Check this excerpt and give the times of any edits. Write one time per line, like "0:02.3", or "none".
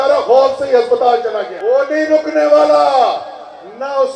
0:01.5